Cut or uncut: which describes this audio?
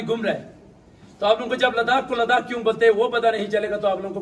uncut